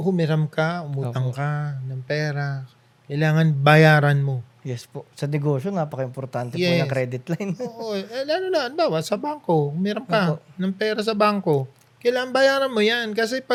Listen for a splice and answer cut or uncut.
uncut